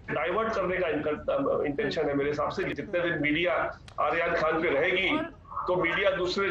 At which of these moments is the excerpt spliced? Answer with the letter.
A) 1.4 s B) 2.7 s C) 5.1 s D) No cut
B